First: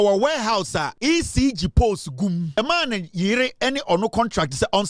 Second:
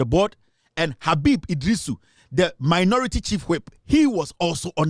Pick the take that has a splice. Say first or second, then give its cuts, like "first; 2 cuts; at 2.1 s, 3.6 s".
first; 2 cuts; at 0.9 s, 2.6 s